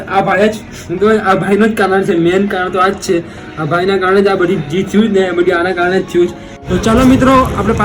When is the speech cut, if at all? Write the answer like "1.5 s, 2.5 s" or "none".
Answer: 6.5 s